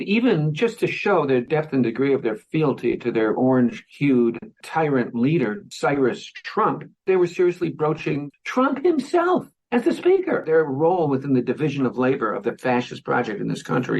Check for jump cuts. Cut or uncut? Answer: cut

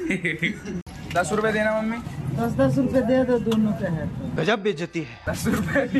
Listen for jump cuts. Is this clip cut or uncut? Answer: cut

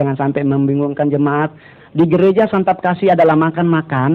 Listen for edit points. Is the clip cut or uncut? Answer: cut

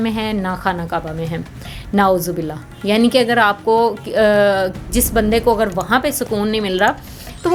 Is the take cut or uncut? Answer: uncut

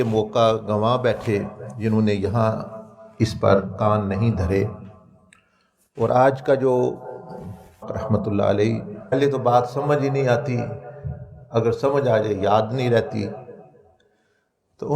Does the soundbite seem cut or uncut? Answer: cut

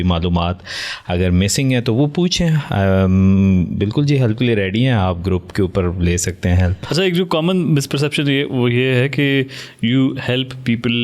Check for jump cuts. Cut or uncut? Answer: uncut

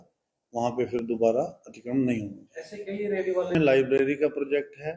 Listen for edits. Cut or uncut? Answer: cut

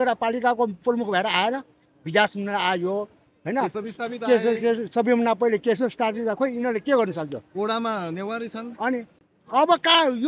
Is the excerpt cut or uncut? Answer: uncut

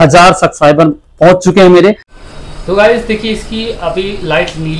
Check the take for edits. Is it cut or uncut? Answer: cut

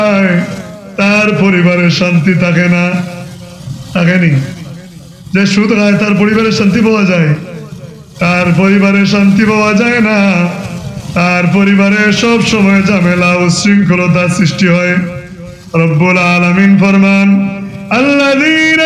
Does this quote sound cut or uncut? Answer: uncut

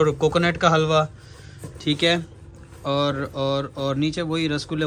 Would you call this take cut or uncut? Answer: uncut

